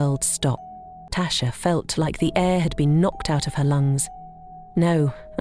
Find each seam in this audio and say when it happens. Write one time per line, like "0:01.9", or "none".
0:01.0